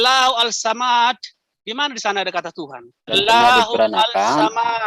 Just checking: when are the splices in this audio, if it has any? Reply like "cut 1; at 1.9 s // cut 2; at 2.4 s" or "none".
cut 1; at 3.1 s